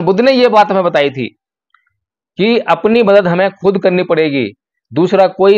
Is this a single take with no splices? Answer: yes; 0 cuts

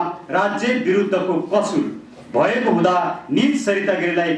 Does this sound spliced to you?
no; 0 cuts

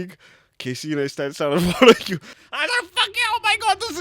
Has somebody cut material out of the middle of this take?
yes; 1 cut; at 2.3 s

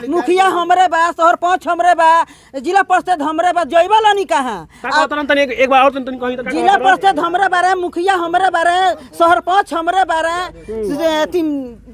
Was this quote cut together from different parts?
no; 0 cuts

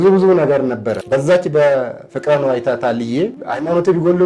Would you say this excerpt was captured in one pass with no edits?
no; 1 cut; at 1.0 s

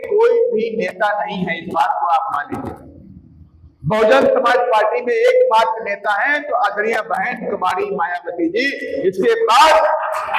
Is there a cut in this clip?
no; 0 cuts

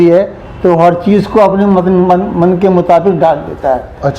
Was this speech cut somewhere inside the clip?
no; 0 cuts

